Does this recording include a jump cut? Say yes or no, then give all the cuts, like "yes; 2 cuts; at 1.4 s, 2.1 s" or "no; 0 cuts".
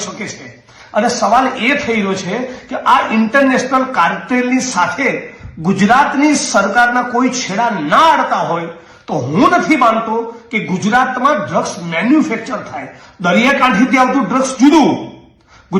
no; 0 cuts